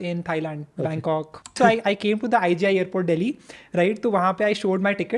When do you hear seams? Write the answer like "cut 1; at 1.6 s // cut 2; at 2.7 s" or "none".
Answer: cut 1; at 1.5 s